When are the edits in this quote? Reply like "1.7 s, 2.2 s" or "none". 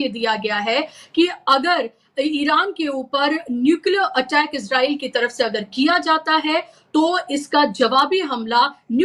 none